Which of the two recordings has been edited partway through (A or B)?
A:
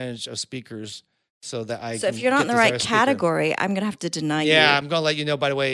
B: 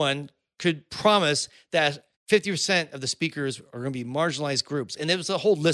B